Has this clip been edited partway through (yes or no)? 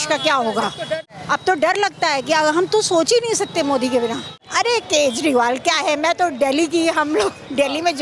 yes